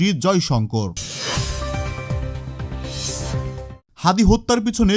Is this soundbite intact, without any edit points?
no; 2 cuts; at 1.1 s, 3.9 s

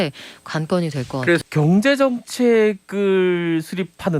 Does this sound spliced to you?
yes; 1 cut; at 1.4 s

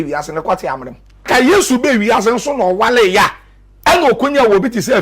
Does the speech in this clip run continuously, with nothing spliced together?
no; 1 cut; at 1.3 s

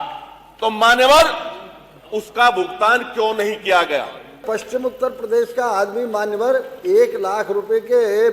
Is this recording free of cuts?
no; 1 cut; at 4.4 s

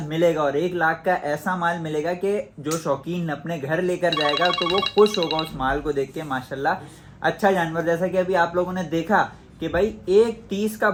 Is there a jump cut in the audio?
no; 0 cuts

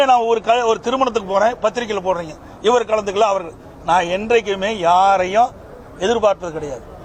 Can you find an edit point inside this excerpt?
no; 0 cuts

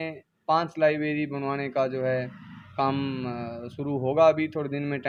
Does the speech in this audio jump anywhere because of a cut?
no; 0 cuts

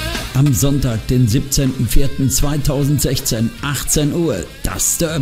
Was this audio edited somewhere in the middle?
no; 0 cuts

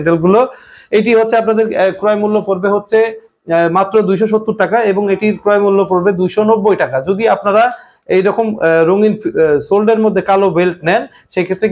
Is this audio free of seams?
yes; 0 cuts

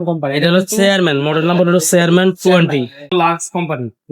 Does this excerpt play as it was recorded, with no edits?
no; 1 cut; at 3.1 s

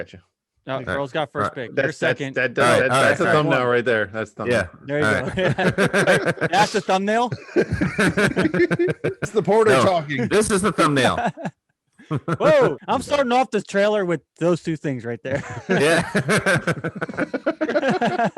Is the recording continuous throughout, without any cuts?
no; 2 cuts; at 9.3 s, 12.8 s

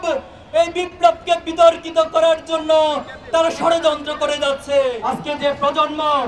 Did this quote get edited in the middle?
yes; 1 cut; at 5.0 s

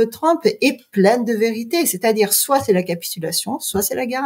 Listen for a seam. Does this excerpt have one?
no; 0 cuts

